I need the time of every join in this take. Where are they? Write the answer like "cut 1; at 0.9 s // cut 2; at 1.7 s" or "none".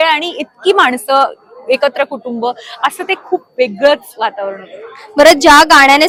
none